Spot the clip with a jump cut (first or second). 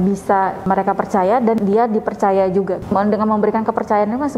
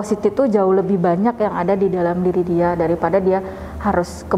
first